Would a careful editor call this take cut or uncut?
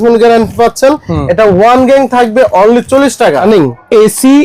cut